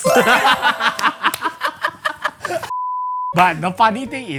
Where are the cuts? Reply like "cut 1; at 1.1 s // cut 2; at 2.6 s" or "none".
none

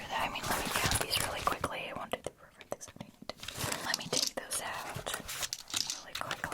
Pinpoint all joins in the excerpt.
cut 1; at 3.9 s

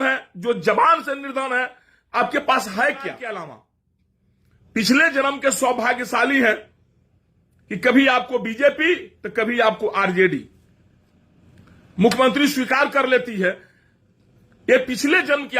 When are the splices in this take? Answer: cut 1; at 3.2 s

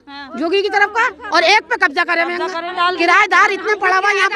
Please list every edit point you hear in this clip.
cut 1; at 2.7 s

